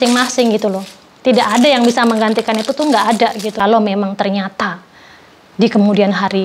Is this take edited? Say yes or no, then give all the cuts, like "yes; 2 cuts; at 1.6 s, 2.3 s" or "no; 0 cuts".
yes; 1 cut; at 3.5 s